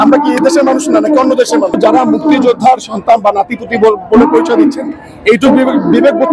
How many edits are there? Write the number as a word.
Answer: one